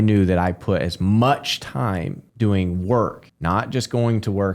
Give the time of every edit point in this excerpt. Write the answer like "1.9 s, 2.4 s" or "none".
2.2 s, 3.3 s